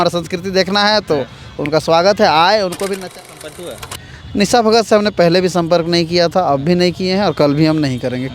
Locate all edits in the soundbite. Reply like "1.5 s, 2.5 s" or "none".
3.1 s